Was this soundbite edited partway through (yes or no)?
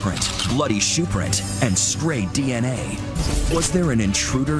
no